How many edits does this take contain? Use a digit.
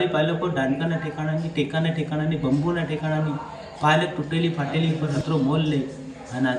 1